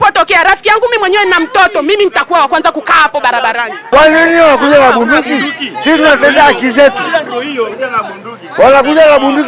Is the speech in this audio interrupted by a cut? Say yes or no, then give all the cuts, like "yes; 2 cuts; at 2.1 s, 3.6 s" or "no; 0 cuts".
yes; 1 cut; at 3.8 s